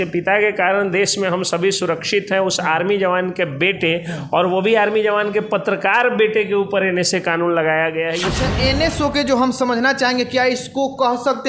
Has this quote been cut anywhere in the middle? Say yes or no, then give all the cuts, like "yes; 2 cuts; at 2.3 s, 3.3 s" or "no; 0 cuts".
yes; 1 cut; at 8.4 s